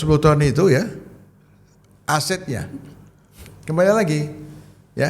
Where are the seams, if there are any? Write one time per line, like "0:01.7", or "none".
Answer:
none